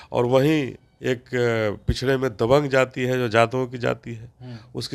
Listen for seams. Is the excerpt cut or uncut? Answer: uncut